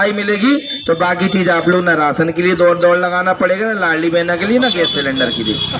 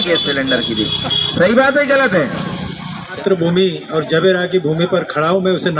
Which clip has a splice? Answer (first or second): second